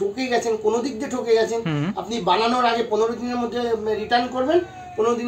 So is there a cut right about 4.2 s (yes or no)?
no